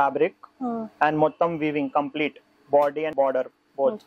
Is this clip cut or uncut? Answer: cut